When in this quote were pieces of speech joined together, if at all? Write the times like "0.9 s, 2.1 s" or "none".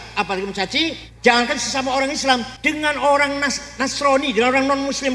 1.1 s, 2.5 s

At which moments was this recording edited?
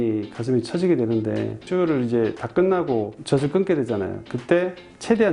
none

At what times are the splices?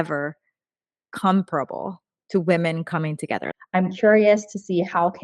3.5 s

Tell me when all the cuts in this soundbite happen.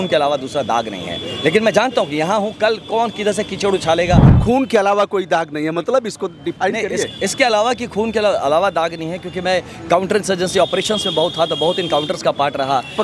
4.4 s

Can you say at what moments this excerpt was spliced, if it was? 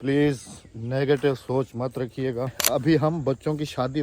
2.6 s

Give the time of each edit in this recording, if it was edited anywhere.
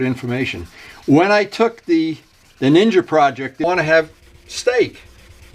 3.6 s

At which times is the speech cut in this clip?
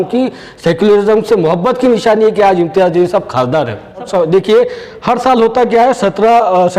4.1 s

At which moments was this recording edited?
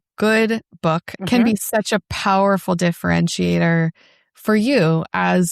1.1 s

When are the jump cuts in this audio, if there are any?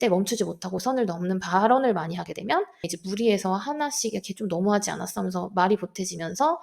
3.0 s

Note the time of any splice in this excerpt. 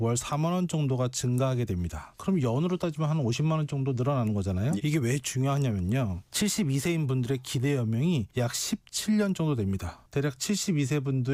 none

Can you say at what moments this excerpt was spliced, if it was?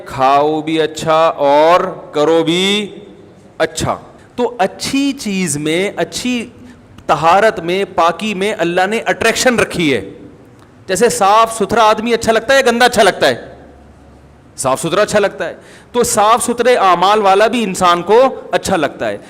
4.2 s

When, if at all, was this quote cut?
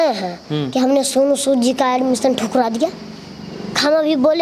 none

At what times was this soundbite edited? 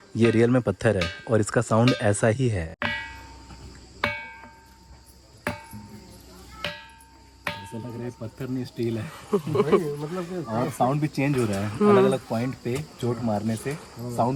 none

